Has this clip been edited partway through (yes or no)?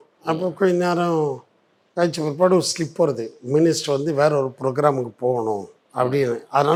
no